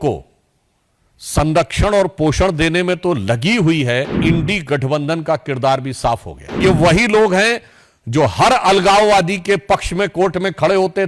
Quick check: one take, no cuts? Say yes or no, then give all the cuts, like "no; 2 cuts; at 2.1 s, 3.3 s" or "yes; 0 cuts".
no; 2 cuts; at 4.2 s, 6.6 s